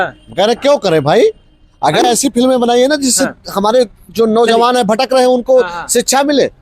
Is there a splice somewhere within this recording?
yes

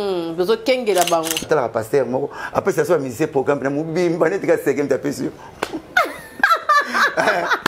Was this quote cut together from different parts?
yes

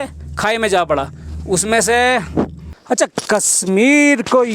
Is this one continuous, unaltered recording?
no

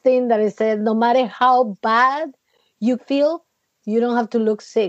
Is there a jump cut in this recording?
yes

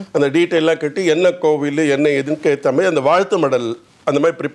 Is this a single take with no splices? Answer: yes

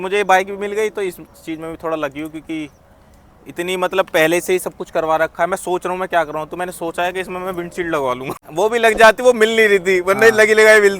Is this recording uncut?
yes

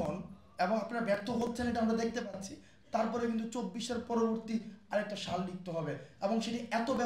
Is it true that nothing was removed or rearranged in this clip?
yes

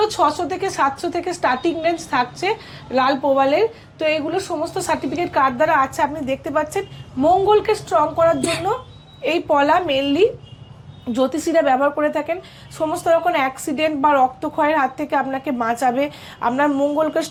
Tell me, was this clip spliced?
no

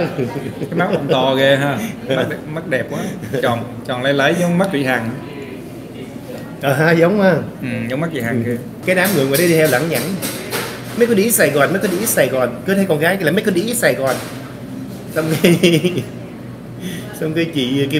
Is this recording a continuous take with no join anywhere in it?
no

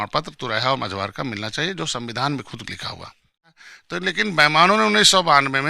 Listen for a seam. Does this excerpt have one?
yes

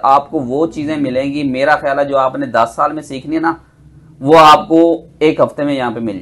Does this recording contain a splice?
no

